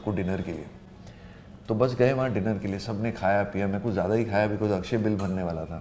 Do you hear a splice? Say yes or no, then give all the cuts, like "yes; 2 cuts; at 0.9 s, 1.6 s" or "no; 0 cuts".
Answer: no; 0 cuts